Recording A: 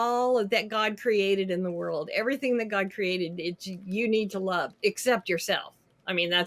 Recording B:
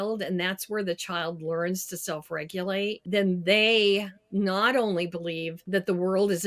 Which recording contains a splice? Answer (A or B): B